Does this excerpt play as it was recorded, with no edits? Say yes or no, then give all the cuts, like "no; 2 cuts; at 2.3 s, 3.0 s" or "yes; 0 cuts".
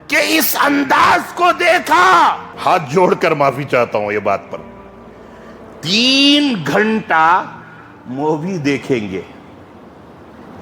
no; 1 cut; at 2.5 s